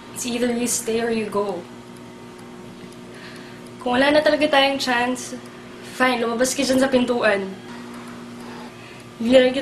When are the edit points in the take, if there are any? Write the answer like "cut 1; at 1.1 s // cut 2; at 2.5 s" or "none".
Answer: none